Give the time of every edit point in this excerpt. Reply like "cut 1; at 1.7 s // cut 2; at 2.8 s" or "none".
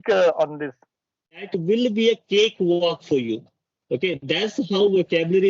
cut 1; at 1.4 s